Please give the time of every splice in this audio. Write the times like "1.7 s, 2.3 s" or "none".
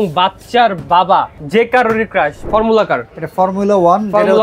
1.4 s, 2.4 s